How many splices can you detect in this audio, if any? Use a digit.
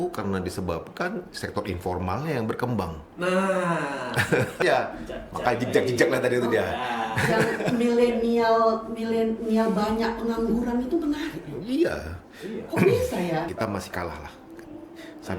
2